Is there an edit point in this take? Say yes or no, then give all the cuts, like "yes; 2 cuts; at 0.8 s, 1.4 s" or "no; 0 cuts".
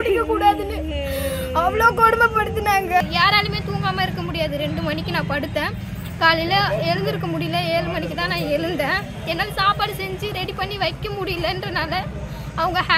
yes; 1 cut; at 3.0 s